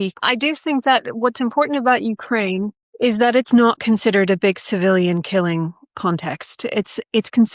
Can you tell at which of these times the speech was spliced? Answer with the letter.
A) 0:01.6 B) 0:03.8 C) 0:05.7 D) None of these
B